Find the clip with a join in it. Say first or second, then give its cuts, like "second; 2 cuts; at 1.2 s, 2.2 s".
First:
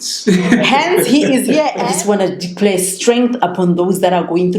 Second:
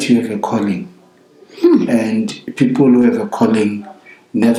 first; 1 cut; at 1.8 s